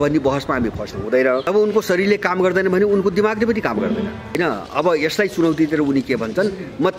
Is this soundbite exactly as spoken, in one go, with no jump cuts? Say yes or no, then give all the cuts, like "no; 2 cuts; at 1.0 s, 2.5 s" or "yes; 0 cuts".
no; 2 cuts; at 1.5 s, 4.4 s